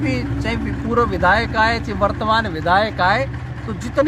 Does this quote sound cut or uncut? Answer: uncut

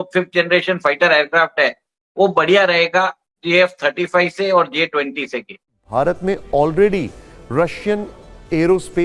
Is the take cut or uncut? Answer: cut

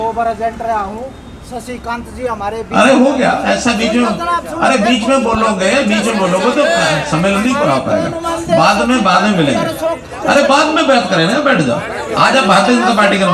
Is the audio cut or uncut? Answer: uncut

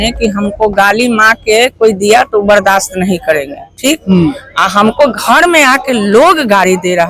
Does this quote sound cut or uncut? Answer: uncut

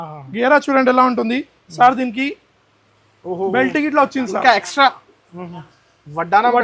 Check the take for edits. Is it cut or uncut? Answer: uncut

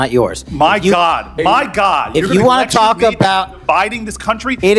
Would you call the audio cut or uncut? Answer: uncut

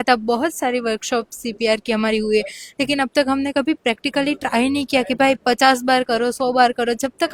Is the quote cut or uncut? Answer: uncut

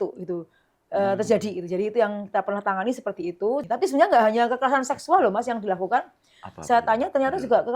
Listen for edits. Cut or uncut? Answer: cut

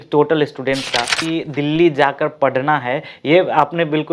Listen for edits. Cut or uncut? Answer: cut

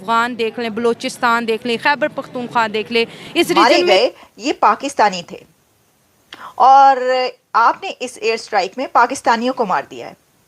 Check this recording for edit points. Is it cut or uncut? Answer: cut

